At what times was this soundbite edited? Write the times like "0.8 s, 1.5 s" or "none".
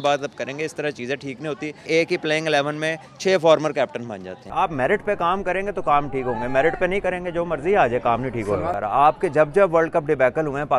1.9 s, 4.3 s, 8.7 s